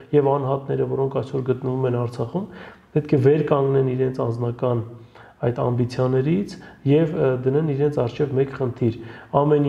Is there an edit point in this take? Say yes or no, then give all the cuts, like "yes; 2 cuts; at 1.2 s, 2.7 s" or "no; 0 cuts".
no; 0 cuts